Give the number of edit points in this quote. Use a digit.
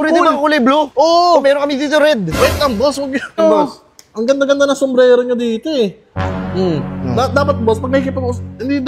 1